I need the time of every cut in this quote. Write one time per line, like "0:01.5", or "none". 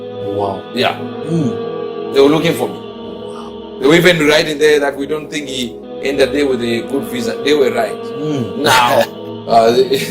0:08.3